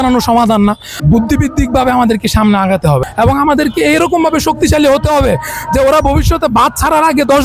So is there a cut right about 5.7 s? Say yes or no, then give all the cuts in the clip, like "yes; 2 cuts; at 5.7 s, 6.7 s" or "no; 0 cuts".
no; 2 cuts; at 0.9 s, 3.0 s